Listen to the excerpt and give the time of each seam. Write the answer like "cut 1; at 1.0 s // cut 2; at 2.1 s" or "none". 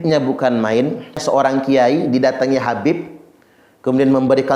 cut 1; at 1.2 s